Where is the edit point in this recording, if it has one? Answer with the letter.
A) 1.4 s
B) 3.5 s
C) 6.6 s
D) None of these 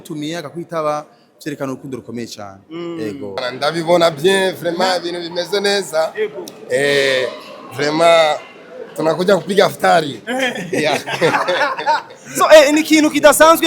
B